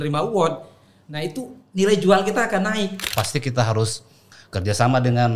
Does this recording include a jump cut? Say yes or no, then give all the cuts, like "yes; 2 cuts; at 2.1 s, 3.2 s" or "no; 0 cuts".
yes; 1 cut; at 3.0 s